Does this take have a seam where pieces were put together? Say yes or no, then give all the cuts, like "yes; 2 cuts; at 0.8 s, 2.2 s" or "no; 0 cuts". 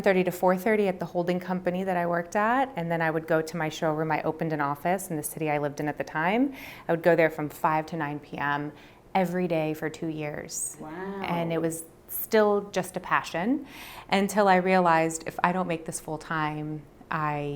no; 0 cuts